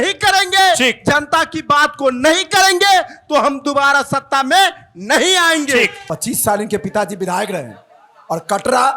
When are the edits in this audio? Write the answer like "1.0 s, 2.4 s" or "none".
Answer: 6.0 s